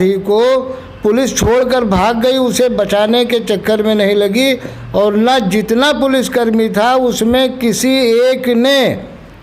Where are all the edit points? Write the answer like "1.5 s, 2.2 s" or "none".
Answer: none

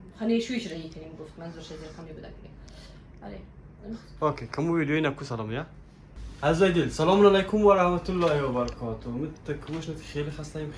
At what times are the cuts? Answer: none

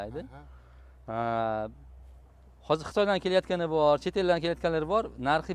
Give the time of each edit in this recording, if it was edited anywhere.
none

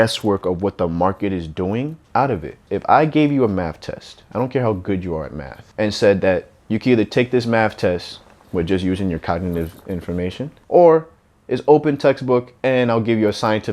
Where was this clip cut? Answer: 2.0 s, 2.6 s, 10.5 s

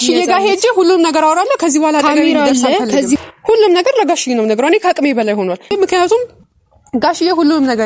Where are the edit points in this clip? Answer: 3.2 s, 5.7 s

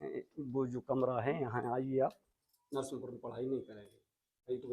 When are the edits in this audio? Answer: 2.3 s

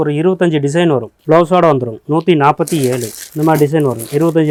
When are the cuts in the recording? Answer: none

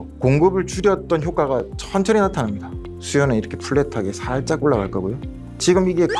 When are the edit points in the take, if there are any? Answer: none

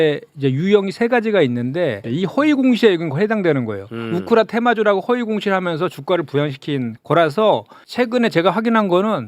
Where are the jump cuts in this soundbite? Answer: 2.0 s, 7.6 s

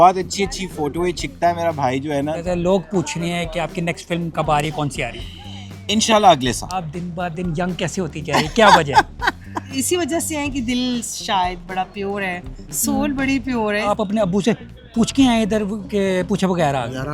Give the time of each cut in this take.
2.4 s, 6.8 s, 9.6 s, 13.8 s

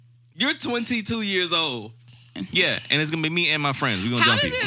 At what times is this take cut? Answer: 2.3 s

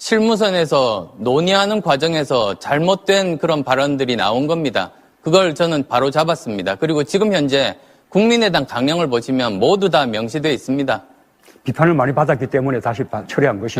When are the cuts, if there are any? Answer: 3.9 s

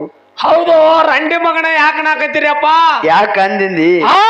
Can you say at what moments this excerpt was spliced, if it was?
none

